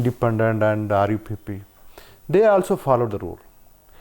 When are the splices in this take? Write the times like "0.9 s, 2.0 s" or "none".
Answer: none